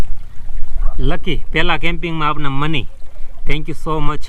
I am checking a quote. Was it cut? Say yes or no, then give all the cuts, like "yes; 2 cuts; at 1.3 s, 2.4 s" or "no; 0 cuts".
no; 0 cuts